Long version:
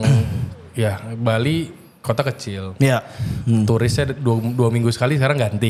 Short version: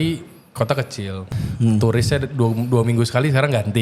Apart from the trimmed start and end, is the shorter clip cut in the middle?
yes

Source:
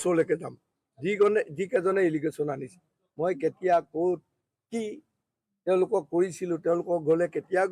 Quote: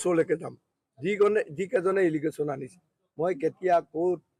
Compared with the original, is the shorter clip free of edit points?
yes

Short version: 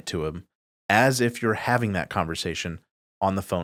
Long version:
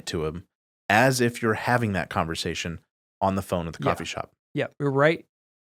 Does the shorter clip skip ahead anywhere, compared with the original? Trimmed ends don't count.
no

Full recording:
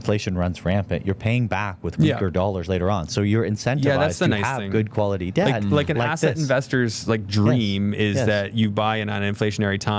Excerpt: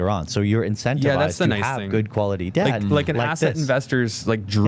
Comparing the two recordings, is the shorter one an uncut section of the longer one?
yes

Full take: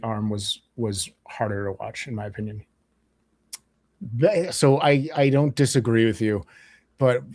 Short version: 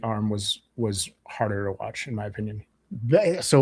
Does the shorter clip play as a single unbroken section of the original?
no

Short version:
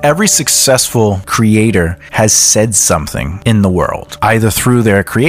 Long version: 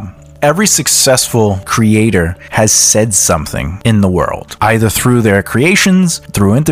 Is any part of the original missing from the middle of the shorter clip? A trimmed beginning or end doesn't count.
no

